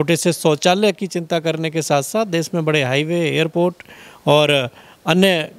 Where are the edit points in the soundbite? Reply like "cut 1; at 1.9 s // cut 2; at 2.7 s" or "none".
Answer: none